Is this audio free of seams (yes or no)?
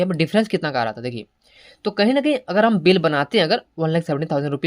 no